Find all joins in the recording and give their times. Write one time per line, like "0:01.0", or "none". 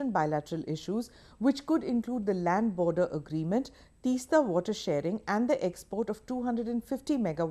0:05.8